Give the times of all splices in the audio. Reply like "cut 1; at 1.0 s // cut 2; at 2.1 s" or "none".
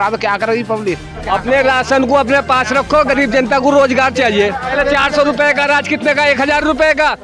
cut 1; at 1.2 s // cut 2; at 4.7 s